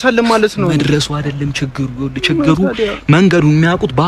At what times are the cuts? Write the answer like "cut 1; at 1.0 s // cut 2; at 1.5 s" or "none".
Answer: none